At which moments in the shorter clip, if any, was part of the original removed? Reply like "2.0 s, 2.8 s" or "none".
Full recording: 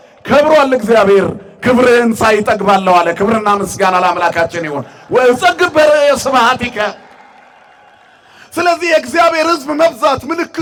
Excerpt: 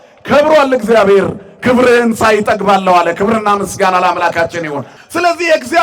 4.9 s